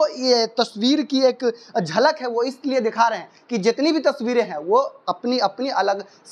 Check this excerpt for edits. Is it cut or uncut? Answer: uncut